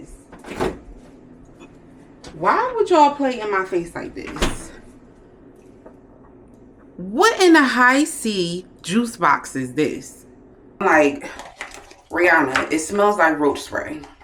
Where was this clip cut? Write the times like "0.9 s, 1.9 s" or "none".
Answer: 10.8 s

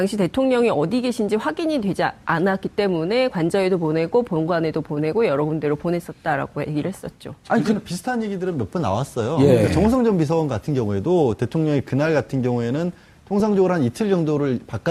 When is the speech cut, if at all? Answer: none

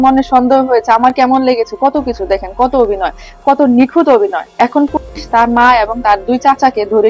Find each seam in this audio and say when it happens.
none

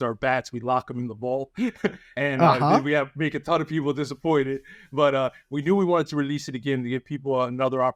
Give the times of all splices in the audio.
none

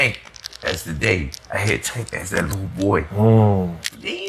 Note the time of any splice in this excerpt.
none

